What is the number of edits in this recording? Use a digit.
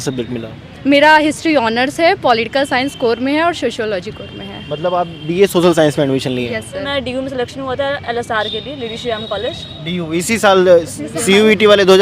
1